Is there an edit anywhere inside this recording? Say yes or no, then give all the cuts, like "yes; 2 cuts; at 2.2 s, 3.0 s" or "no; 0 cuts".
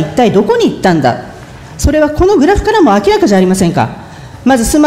no; 0 cuts